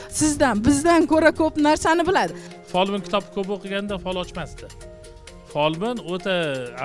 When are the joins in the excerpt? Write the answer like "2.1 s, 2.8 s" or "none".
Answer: 2.5 s